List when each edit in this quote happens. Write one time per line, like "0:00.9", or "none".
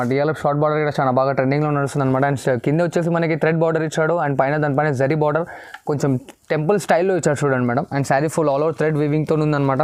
none